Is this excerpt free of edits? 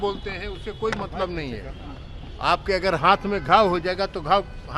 yes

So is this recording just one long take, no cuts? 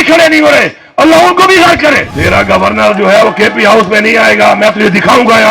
no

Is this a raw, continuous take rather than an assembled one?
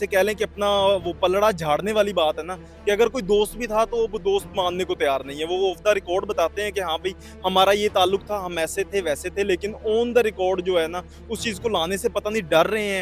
yes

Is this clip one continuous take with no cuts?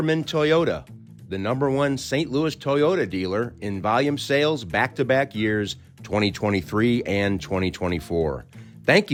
yes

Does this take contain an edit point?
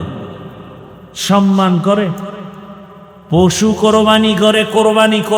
no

